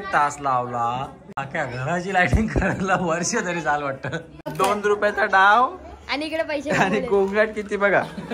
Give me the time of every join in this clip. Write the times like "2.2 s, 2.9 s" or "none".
4.5 s